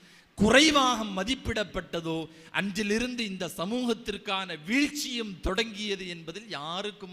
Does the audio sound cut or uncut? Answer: uncut